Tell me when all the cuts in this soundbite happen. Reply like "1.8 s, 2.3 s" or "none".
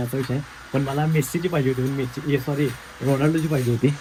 none